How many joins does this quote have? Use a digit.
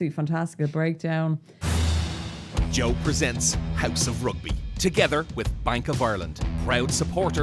1